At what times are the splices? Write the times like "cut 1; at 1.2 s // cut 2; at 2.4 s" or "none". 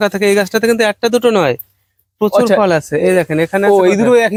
none